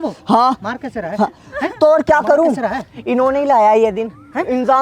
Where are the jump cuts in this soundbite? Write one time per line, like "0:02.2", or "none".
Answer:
none